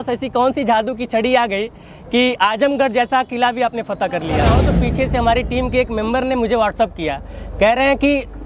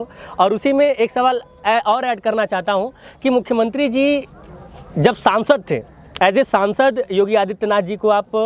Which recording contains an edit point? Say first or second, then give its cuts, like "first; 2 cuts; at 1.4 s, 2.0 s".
first; 1 cut; at 4.5 s